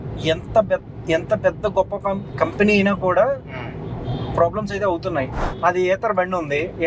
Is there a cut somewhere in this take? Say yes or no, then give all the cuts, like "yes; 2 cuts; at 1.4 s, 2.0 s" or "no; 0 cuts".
yes; 1 cut; at 5.4 s